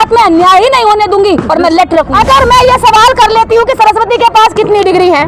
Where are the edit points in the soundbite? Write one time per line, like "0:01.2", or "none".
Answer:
0:02.1